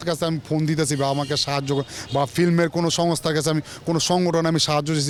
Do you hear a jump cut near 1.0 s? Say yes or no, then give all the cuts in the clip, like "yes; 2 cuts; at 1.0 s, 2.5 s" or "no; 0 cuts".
no; 0 cuts